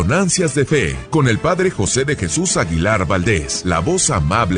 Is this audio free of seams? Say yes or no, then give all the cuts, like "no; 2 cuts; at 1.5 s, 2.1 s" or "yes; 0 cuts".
no; 2 cuts; at 1.0 s, 3.5 s